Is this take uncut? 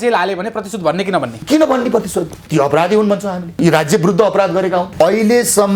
no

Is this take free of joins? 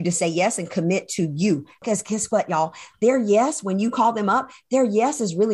no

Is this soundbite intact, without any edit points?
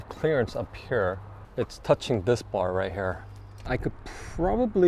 no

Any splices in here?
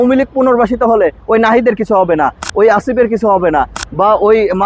no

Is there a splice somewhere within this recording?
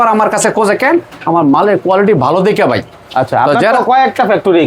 no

